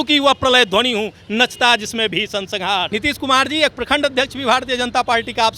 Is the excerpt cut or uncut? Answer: cut